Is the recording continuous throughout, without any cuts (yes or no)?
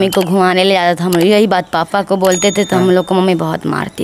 yes